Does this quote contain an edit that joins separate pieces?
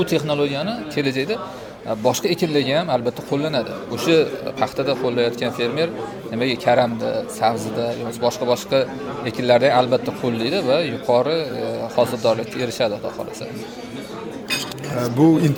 no; 0 cuts

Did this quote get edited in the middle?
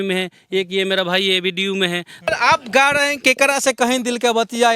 yes; 1 cut; at 2.3 s

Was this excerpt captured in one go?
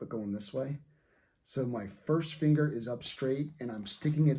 yes; 0 cuts

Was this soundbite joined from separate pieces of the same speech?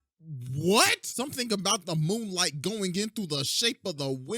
yes; 1 cut; at 1.1 s

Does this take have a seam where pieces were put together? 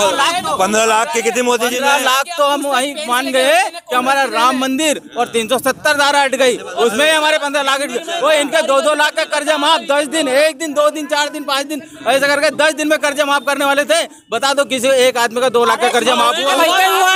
no; 0 cuts

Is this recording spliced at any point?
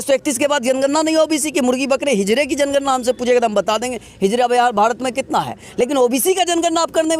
no; 0 cuts

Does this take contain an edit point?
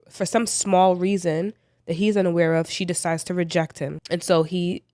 yes; 1 cut; at 4.0 s

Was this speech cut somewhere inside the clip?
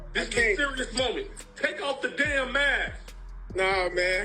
no; 0 cuts

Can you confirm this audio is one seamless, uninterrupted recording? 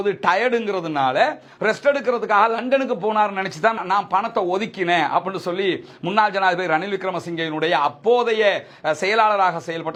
yes; 0 cuts

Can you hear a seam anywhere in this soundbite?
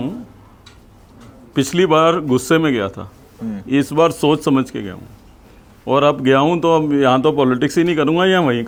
no; 0 cuts

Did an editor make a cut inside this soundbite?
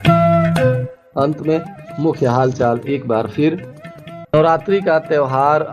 no; 0 cuts

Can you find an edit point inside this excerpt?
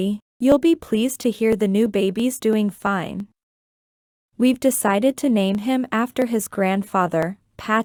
no; 0 cuts

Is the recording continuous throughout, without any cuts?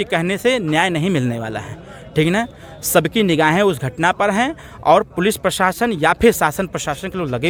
yes; 0 cuts

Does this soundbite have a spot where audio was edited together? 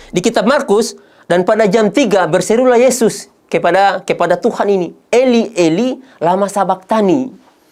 no; 0 cuts

